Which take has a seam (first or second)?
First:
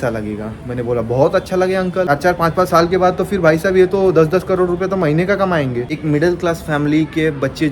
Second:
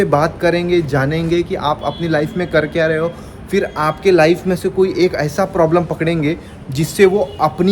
first